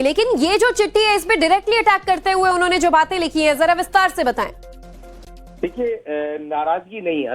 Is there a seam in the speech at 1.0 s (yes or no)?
yes